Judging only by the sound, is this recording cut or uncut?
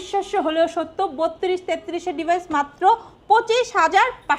uncut